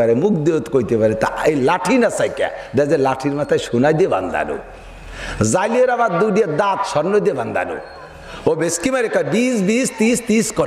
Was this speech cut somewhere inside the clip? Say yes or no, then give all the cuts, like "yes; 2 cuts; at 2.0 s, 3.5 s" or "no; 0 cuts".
no; 0 cuts